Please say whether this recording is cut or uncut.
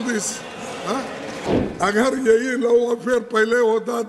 cut